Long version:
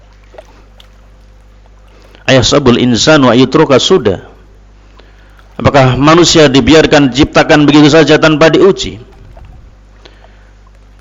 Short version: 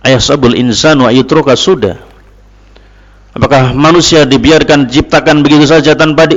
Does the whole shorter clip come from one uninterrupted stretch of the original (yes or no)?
yes